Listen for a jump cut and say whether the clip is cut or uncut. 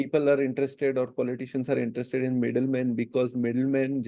uncut